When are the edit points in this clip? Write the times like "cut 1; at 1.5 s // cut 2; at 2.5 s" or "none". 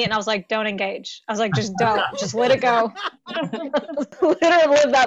cut 1; at 4.2 s